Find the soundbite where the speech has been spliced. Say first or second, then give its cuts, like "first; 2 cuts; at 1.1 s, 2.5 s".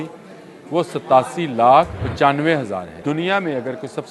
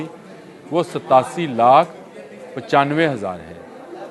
first; 2 cuts; at 2.0 s, 2.9 s